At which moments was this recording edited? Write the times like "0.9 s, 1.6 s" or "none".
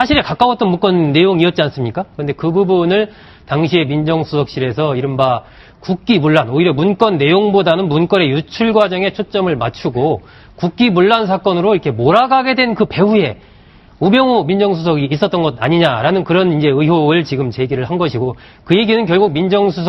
10.8 s